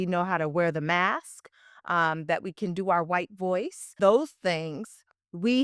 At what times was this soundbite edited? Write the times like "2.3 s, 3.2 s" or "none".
4.0 s